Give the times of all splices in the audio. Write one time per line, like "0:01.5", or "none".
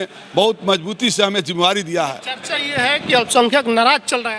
none